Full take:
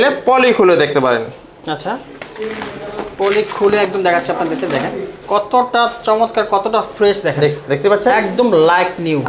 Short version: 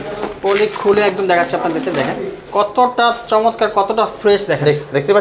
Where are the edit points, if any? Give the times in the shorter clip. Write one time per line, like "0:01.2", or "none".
none